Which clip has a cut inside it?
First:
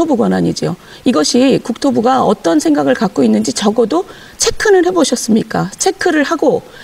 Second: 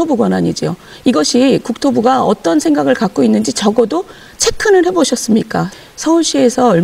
second; 1 cut; at 5.7 s

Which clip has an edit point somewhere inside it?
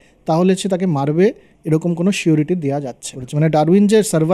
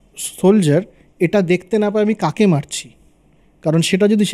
first; 1 cut; at 3.2 s

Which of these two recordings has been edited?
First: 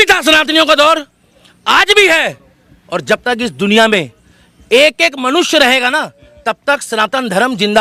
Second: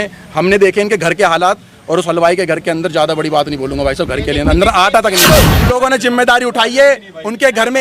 second; 1 cut; at 5.3 s

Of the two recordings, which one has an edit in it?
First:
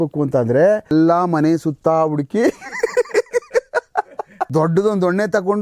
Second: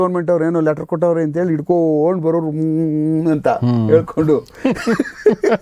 first; 2 cuts; at 0.9 s, 4.3 s

